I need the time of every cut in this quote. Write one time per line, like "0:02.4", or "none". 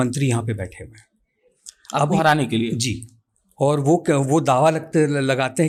none